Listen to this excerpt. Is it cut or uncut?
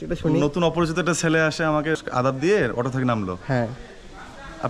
cut